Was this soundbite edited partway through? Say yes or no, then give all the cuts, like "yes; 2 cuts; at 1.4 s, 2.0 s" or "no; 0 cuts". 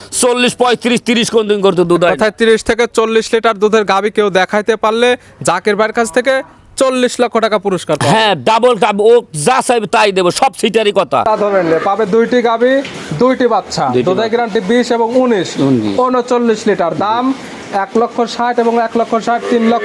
yes; 1 cut; at 11.3 s